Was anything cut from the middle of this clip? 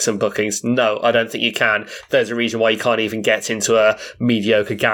no; 0 cuts

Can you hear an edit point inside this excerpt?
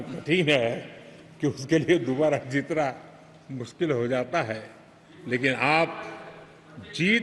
no; 0 cuts

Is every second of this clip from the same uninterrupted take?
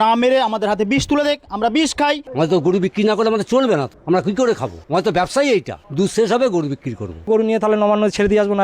no; 5 cuts; at 2.2 s, 3.9 s, 4.7 s, 5.8 s, 7.3 s

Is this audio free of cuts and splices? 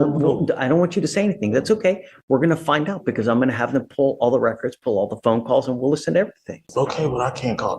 no; 1 cut; at 6.6 s

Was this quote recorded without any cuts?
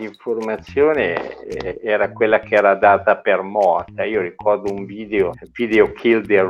yes; 0 cuts

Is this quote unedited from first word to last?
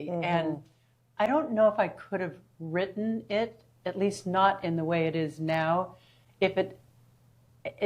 yes; 0 cuts

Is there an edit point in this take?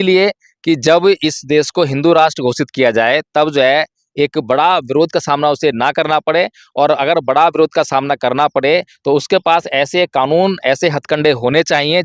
no; 0 cuts

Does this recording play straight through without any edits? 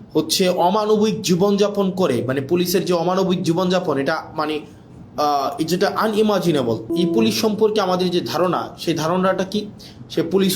no; 1 cut; at 6.9 s

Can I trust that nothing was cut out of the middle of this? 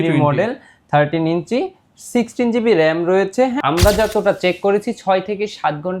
no; 1 cut; at 3.6 s

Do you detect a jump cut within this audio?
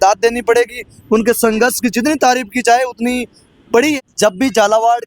yes; 1 cut; at 3.9 s

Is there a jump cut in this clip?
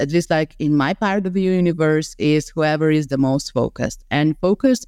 no; 0 cuts

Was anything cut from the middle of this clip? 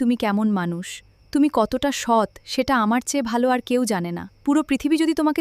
no; 0 cuts

